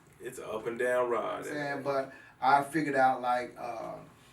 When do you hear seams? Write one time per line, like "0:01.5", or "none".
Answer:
0:01.5